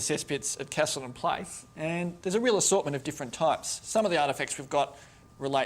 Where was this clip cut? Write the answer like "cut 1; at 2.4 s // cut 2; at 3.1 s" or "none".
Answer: cut 1; at 3.7 s